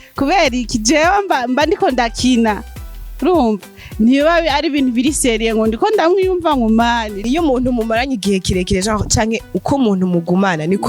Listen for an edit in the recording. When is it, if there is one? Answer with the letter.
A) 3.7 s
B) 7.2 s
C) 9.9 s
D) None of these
B